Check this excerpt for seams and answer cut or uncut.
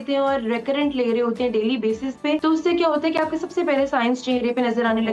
cut